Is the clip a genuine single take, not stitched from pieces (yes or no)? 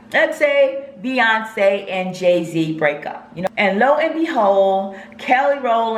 no